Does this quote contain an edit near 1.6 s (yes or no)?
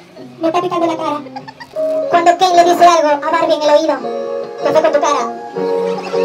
yes